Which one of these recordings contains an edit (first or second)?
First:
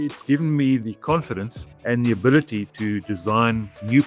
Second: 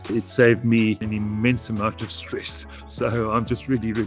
second